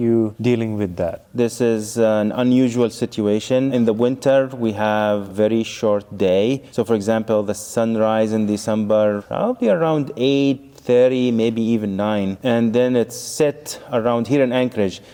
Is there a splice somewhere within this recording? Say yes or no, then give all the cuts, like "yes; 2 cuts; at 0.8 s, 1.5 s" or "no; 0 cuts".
no; 0 cuts